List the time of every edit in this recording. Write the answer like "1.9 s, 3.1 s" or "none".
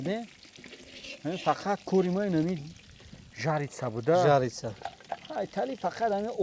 none